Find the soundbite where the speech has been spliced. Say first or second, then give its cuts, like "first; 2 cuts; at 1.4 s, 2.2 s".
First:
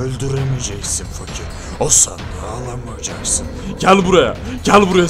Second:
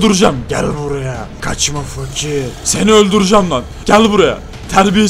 second; 3 cuts; at 1.3 s, 2.6 s, 3.7 s